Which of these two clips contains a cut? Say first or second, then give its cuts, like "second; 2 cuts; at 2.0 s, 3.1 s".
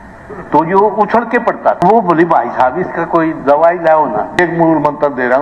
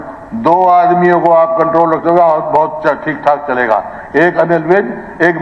first; 2 cuts; at 1.8 s, 4.4 s